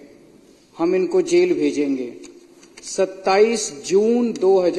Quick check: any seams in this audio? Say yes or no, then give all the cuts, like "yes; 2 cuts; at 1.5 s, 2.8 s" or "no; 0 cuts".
no; 0 cuts